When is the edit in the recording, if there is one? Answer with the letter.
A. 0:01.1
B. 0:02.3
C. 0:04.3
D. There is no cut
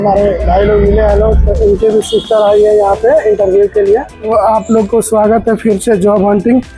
C